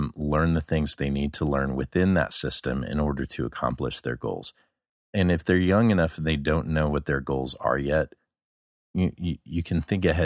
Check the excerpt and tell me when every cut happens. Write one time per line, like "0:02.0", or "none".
none